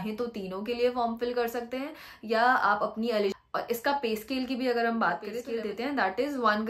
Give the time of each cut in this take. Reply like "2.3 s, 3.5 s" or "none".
3.3 s, 5.3 s